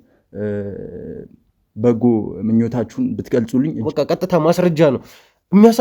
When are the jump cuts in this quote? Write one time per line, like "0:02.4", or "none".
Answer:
0:03.9